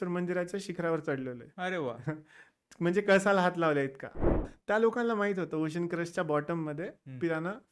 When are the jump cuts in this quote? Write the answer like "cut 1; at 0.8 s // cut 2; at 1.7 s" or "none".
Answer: cut 1; at 4.4 s